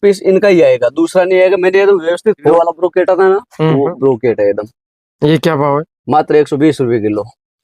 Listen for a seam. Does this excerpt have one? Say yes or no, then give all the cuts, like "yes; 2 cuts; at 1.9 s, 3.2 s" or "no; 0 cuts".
yes; 1 cut; at 2.5 s